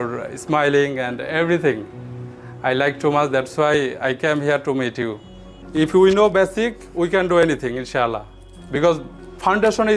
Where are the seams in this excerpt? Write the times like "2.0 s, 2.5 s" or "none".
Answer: 5.2 s